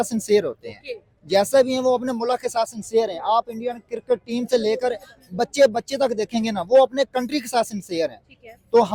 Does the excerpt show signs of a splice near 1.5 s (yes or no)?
no